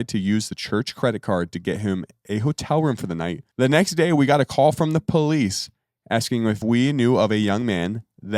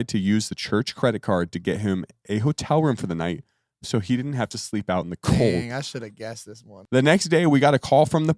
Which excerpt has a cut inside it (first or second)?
first